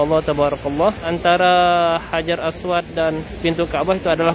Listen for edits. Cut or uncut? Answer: cut